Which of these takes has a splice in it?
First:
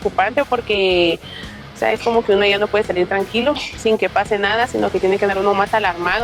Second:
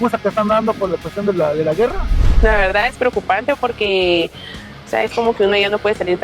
second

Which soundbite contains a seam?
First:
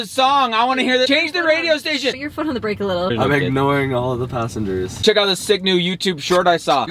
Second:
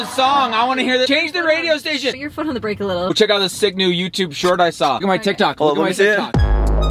first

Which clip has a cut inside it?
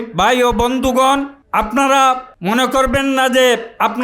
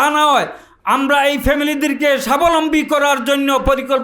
first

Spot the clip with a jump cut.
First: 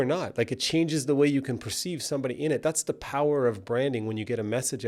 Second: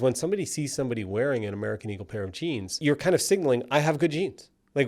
second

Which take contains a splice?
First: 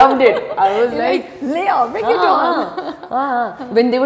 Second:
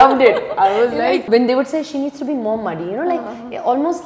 second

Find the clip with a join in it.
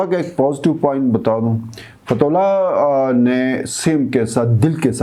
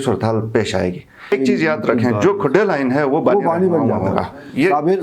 second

